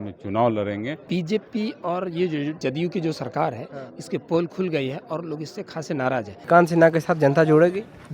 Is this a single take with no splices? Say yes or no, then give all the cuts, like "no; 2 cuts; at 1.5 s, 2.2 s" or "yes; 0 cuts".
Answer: no; 3 cuts; at 1.0 s, 2.6 s, 6.4 s